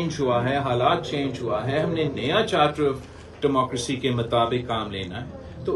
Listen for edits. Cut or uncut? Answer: uncut